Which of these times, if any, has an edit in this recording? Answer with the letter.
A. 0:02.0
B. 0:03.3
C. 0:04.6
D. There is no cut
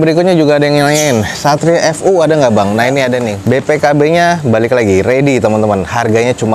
B